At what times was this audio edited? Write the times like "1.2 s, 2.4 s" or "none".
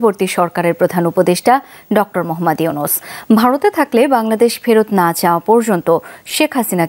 none